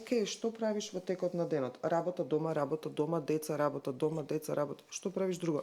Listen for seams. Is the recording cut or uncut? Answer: uncut